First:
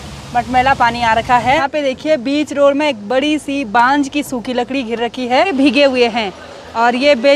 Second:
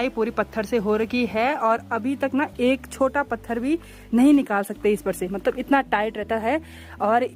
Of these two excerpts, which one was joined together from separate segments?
first; 2 cuts; at 1.6 s, 5.5 s

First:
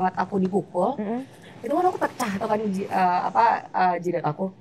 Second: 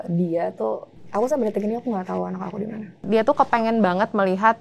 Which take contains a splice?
second; 2 cuts; at 0.9 s, 3.0 s

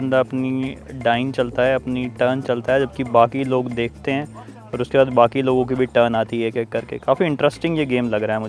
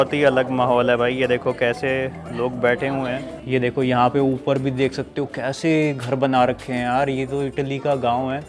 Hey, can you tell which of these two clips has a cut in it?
second; 1 cut; at 3.3 s

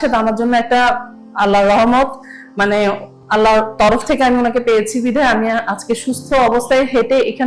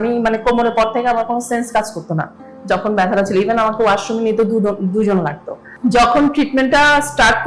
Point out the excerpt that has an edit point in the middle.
second; 1 cut; at 5.8 s

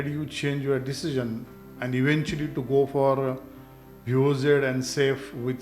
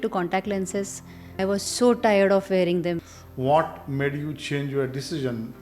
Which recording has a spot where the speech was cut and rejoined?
second; 2 cuts; at 1.4 s, 3.1 s

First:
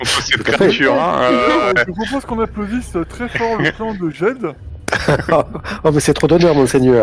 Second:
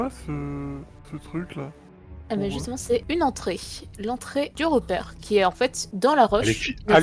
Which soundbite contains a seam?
second; 3 cuts; at 3.0 s, 4.5 s, 5.8 s

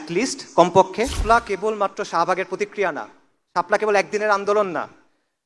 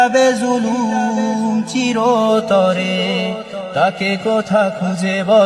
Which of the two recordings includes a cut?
first; 1 cut; at 1.2 s

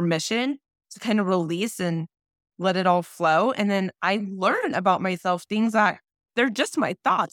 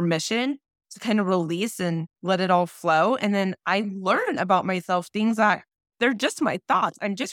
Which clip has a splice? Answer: second; 1 cut; at 2.1 s

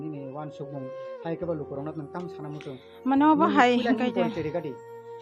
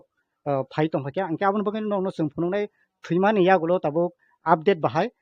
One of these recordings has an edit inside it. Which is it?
second; 1 cut; at 1.1 s

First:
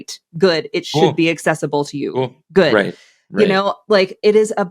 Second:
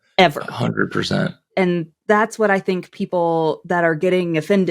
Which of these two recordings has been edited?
second; 1 cut; at 1.6 s

